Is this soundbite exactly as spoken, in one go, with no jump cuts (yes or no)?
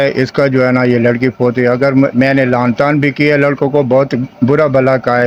yes